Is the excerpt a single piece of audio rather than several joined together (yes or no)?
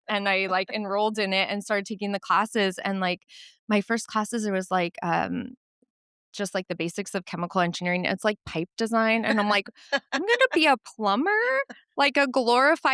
yes